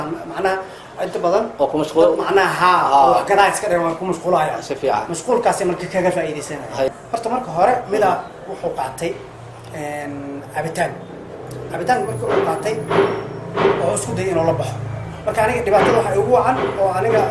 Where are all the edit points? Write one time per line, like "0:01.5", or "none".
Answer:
0:06.9